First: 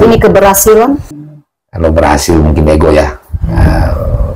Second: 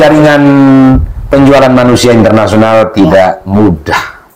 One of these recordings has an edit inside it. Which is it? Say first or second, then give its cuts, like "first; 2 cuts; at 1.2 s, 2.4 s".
first; 1 cut; at 1.0 s